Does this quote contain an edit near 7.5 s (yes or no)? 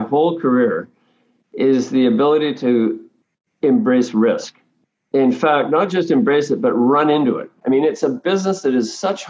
yes